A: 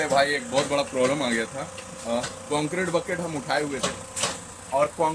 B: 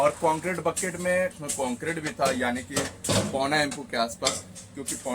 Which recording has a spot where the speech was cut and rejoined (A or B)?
B